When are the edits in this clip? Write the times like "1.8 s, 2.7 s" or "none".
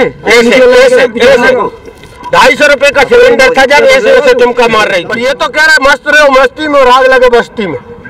5.1 s